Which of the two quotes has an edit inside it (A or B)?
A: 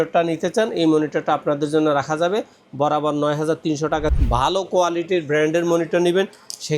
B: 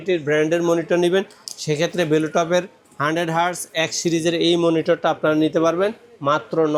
A